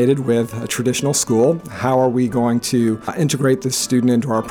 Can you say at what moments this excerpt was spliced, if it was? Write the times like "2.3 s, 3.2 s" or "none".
3.1 s